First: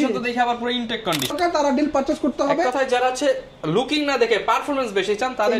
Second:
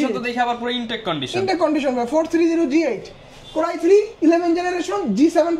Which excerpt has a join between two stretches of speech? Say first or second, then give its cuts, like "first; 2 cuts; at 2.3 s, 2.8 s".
first; 1 cut; at 1.3 s